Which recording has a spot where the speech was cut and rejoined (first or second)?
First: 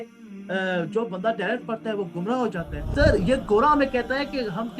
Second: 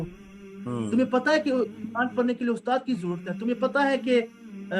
first